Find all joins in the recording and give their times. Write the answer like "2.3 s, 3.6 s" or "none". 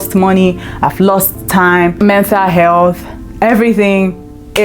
1.9 s